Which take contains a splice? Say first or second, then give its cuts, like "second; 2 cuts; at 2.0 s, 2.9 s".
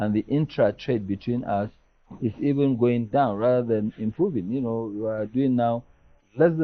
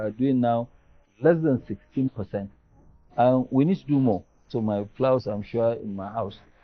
second; 1 cut; at 4.5 s